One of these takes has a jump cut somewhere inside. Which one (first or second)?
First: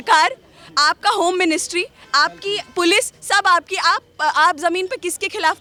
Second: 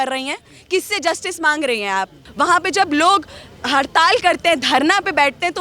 second